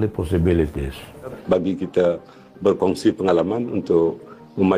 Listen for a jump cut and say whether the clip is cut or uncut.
cut